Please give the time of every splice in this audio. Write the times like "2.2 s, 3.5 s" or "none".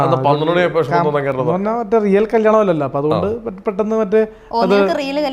1.3 s